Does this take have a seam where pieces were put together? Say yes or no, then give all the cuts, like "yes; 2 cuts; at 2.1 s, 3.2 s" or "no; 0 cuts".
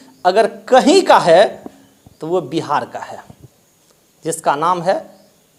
no; 0 cuts